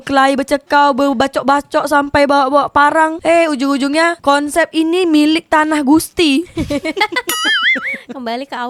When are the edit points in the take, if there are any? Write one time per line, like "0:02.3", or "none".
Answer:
none